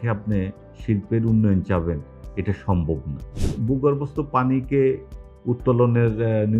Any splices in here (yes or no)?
yes